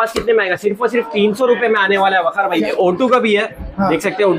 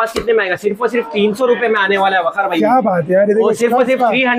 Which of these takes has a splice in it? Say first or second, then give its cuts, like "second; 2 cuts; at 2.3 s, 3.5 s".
first; 1 cut; at 2.6 s